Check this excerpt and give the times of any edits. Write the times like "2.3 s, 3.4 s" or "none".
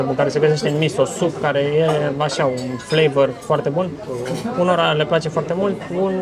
none